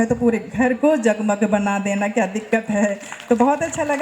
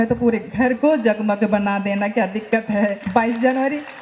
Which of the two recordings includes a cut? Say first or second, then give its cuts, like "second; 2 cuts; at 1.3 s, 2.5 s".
second; 1 cut; at 3.0 s